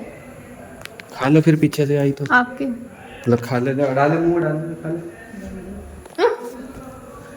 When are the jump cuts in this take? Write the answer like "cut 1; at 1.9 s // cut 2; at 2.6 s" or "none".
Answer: none